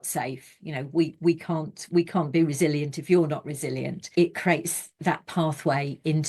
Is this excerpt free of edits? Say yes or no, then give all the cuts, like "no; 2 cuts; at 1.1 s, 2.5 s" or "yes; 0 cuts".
no; 2 cuts; at 4.1 s, 5.0 s